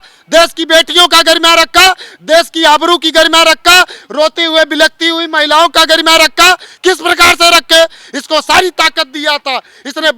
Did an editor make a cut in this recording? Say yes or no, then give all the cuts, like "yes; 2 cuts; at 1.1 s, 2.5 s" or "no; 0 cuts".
no; 0 cuts